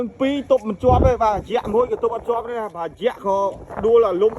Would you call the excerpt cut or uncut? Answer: uncut